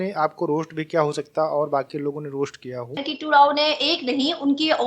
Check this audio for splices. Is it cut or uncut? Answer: cut